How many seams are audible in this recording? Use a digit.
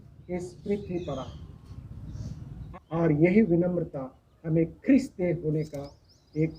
1